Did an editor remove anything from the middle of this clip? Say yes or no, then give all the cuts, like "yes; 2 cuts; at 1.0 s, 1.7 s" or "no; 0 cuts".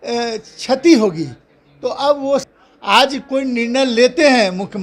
yes; 1 cut; at 2.4 s